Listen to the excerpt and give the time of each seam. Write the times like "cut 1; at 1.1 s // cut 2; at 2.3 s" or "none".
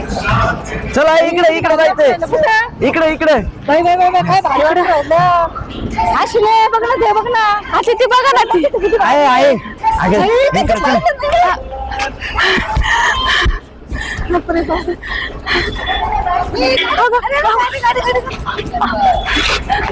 none